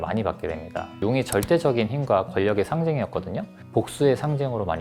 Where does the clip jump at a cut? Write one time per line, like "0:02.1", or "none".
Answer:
0:01.0
0:03.6